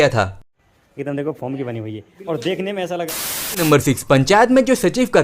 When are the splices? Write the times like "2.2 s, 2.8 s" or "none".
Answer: 3.6 s